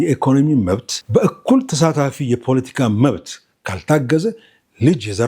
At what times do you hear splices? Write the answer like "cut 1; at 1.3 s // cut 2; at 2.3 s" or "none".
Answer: cut 1; at 0.9 s